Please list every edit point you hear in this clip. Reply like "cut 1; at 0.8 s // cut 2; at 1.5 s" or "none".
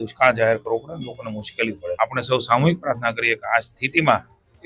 cut 1; at 1.9 s